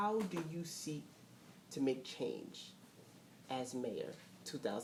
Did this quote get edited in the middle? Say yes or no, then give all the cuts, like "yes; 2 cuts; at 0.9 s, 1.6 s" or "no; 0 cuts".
no; 0 cuts